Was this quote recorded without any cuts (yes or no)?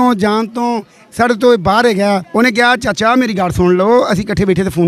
no